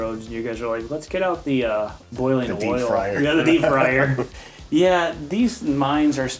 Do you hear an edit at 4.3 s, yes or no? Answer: yes